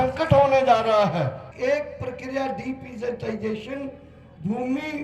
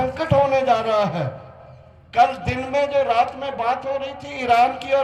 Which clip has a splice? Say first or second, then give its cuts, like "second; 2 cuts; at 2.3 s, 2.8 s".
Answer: first; 1 cut; at 1.4 s